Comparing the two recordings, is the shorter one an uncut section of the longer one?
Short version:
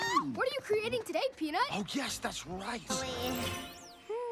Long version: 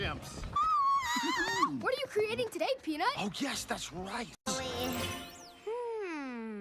no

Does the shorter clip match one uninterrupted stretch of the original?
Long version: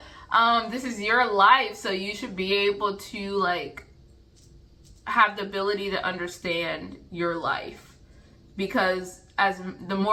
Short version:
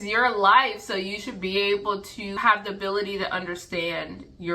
no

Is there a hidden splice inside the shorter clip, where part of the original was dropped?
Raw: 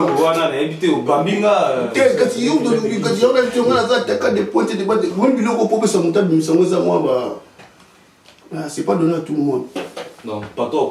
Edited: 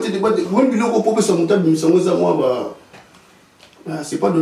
no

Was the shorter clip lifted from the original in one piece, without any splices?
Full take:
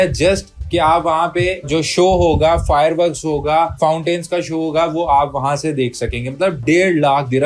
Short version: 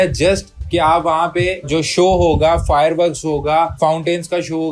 yes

